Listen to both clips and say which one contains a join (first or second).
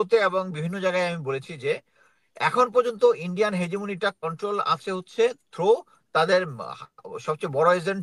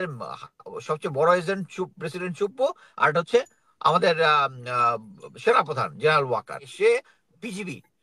second